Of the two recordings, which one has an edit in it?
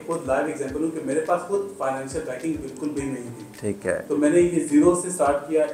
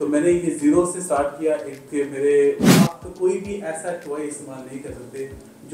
second; 1 cut; at 2.7 s

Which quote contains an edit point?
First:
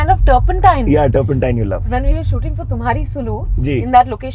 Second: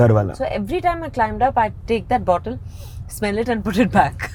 first; 1 cut; at 1.9 s

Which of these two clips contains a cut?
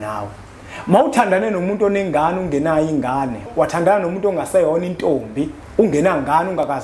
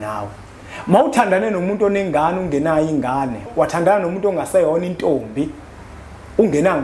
first; 1 cut; at 5.6 s

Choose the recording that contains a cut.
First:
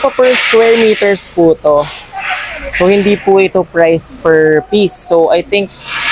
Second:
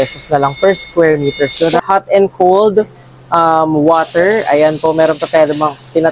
second; 1 cut; at 1.8 s

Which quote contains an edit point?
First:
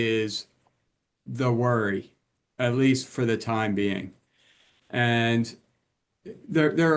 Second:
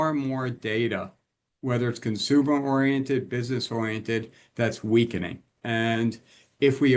second; 1 cut; at 5.5 s

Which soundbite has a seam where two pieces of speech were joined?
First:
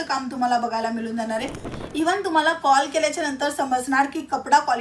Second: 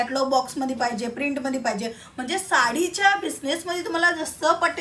first; 1 cut; at 1.9 s

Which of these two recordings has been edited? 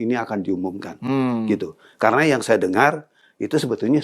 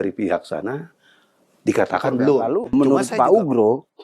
second; 1 cut; at 2.5 s

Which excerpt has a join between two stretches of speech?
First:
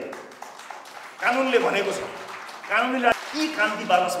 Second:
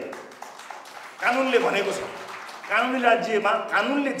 first; 1 cut; at 3.1 s

